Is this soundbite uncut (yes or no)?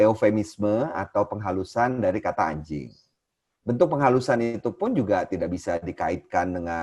yes